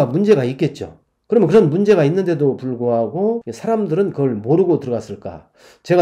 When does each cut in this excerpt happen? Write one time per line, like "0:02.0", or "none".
0:03.5